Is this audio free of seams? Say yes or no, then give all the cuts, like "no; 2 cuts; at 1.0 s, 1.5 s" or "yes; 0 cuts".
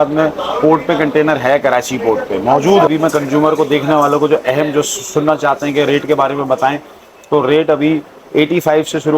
no; 1 cut; at 2.9 s